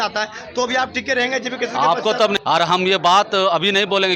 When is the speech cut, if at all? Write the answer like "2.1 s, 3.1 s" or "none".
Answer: 2.4 s